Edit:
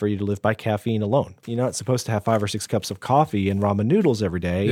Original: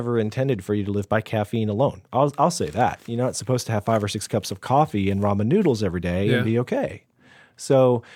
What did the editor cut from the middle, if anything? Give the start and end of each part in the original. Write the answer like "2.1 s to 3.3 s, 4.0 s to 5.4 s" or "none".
2.0 s to 3.0 s